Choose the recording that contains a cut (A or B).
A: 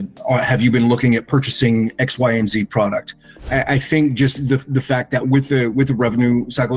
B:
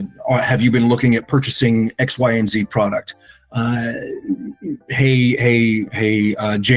A